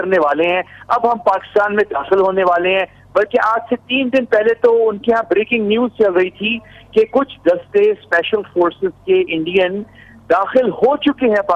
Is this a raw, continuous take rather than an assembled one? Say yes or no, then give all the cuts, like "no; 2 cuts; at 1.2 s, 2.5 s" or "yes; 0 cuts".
yes; 0 cuts